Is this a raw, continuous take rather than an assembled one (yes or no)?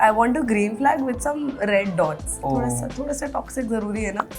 yes